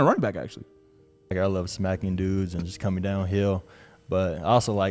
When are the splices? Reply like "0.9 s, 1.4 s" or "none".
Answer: 1.3 s